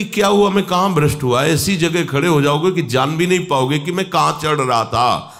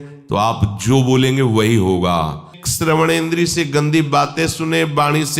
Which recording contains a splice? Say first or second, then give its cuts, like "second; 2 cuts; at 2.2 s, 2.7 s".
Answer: second; 1 cut; at 2.6 s